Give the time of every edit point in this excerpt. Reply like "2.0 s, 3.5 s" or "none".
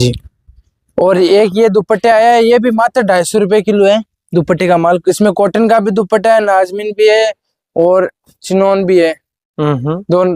none